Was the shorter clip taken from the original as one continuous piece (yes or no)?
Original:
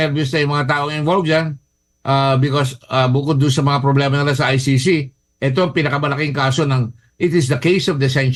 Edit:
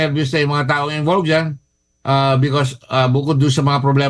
yes